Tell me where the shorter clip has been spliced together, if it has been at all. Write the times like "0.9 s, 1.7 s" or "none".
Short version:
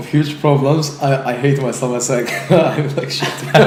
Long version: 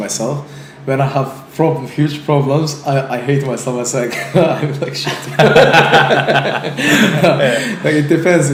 none